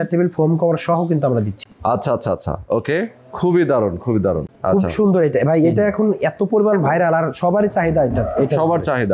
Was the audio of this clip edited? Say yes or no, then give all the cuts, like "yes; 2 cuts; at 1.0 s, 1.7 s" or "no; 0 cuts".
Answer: no; 0 cuts